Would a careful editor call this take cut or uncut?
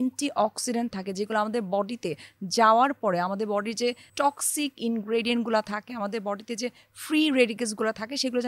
cut